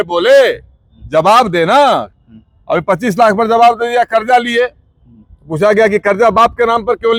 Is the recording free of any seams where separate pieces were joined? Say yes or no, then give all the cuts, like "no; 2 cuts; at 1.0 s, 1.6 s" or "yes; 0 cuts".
yes; 0 cuts